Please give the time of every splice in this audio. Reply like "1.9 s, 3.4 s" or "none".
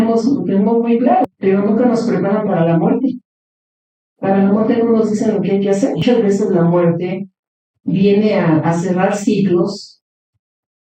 1.2 s, 6.0 s